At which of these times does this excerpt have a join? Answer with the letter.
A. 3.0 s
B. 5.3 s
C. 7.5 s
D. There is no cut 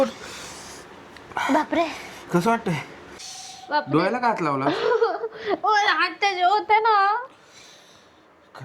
A